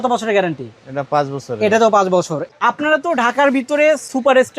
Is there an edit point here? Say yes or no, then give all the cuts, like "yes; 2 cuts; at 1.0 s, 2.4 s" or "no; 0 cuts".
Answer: yes; 1 cut; at 2.5 s